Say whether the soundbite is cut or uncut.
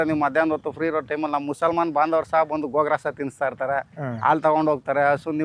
uncut